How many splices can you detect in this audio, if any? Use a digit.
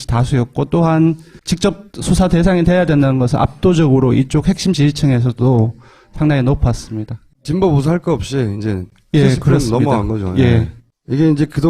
1